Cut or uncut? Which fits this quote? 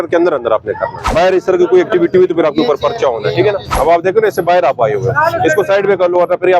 cut